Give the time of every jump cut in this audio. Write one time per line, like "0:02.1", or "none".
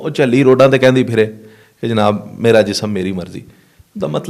none